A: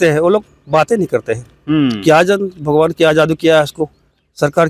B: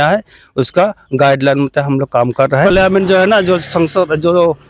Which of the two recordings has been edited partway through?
B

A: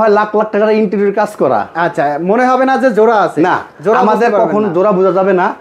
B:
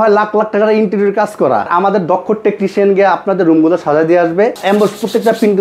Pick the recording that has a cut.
B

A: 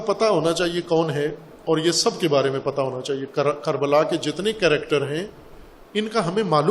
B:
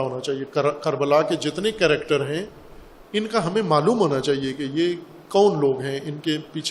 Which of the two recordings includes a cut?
A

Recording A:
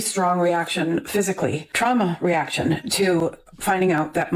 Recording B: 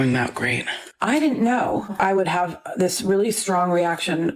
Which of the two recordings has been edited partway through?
B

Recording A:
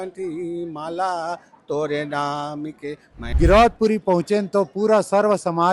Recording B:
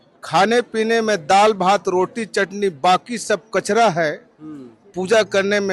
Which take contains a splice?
A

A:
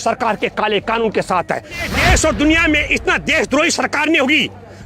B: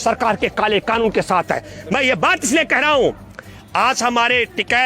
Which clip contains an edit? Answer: A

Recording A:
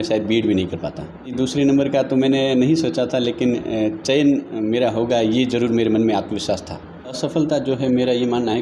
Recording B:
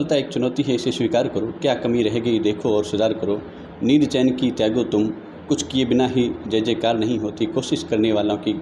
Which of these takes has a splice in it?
A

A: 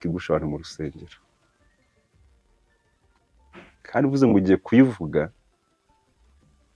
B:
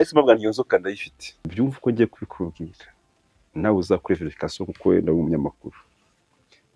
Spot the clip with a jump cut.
B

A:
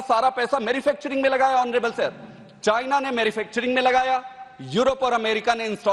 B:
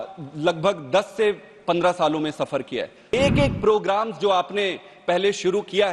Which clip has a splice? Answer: B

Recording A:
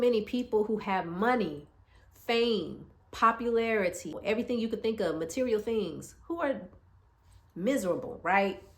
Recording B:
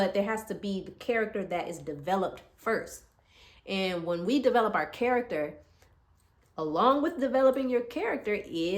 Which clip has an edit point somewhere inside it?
A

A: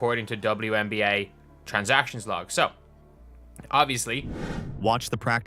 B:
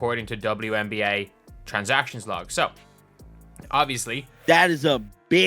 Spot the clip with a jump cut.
B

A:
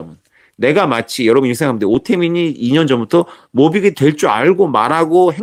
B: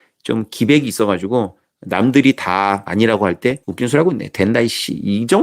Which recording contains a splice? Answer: B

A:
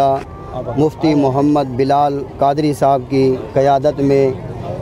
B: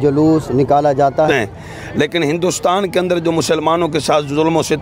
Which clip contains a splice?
B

